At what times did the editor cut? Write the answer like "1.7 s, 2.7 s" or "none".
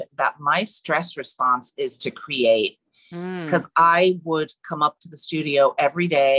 none

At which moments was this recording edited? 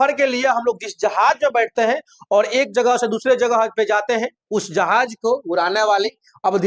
none

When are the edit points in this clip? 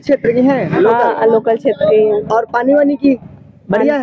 none

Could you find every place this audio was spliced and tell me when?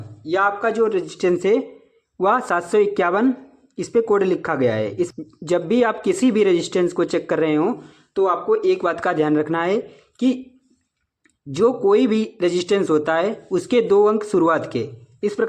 5.1 s

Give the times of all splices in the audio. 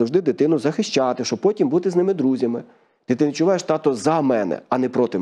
none

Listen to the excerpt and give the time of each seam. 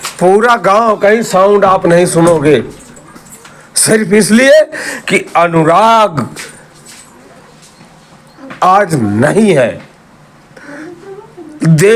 none

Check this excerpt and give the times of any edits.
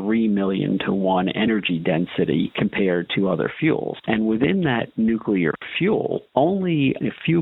none

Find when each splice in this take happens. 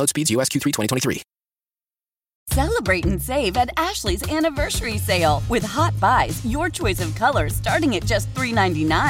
2.4 s

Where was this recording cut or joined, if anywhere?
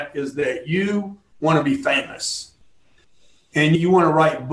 none

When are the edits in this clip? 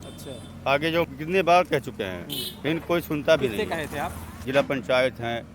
1.1 s, 4.4 s

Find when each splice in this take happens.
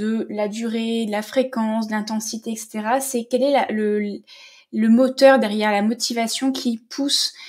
none

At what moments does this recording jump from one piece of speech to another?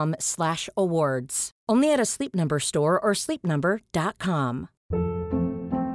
4.7 s

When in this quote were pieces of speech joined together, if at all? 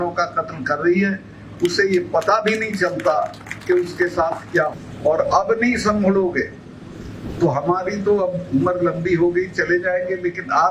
4.7 s

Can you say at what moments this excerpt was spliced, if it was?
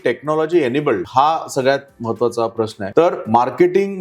1.1 s, 2.8 s

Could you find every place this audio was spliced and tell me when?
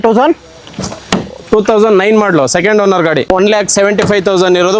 3.3 s

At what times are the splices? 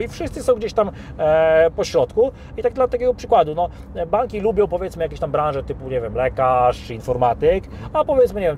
none

